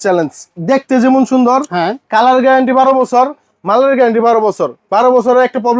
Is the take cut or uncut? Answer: uncut